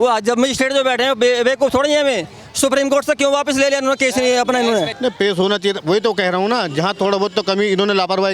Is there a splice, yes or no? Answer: yes